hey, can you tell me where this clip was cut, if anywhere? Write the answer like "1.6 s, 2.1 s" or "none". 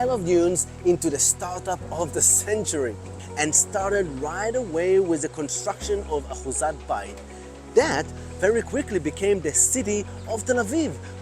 3.2 s